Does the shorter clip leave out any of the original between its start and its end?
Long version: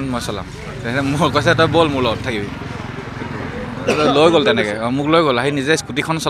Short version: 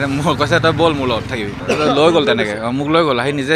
yes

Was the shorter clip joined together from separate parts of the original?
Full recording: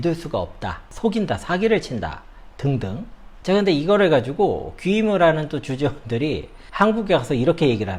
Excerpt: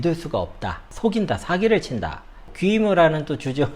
yes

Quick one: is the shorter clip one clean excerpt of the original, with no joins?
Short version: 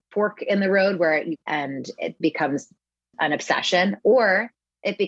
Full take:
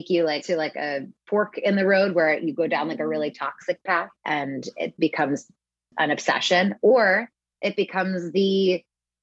no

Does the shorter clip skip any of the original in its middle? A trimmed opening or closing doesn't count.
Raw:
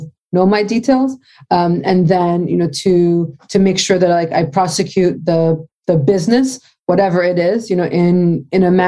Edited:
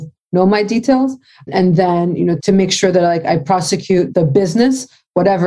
yes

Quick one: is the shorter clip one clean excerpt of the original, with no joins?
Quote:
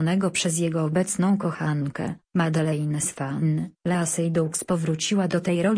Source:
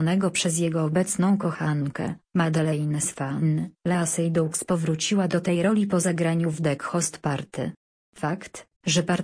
yes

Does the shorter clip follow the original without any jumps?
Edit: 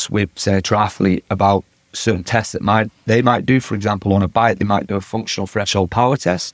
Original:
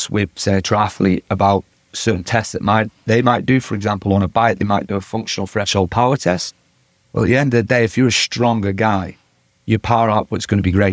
yes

